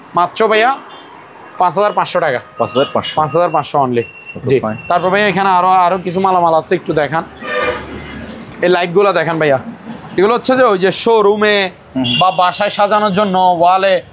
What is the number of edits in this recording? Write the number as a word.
zero